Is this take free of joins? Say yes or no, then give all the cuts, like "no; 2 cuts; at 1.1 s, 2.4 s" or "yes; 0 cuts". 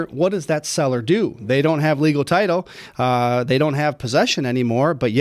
yes; 0 cuts